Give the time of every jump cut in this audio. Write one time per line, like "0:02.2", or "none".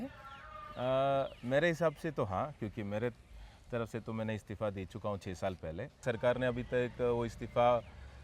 0:05.9